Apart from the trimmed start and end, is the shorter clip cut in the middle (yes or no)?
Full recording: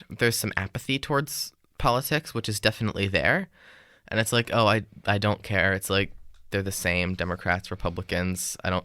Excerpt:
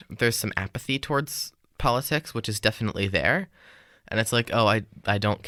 no